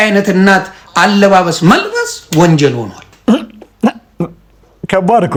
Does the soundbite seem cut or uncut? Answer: uncut